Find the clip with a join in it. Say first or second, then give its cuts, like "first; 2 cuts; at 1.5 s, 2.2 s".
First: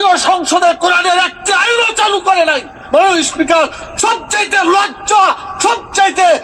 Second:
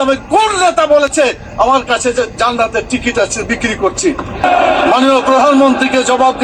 second; 1 cut; at 4.4 s